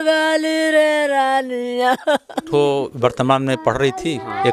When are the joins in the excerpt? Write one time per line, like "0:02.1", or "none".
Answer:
0:02.4